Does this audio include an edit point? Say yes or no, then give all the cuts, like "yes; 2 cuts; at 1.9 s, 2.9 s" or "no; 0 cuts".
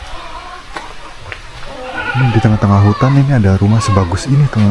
no; 0 cuts